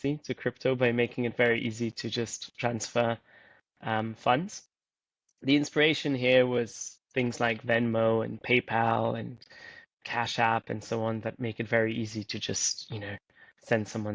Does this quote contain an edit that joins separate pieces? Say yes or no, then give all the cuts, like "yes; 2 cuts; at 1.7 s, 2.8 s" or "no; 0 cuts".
no; 0 cuts